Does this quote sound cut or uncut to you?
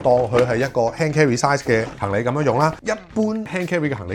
cut